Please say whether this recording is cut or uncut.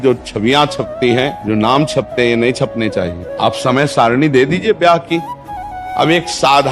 cut